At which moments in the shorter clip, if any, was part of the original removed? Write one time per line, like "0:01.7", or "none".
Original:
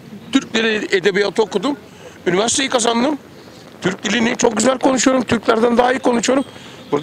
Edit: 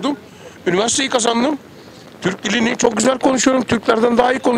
none